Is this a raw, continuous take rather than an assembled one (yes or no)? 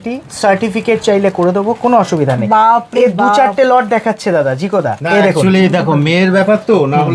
yes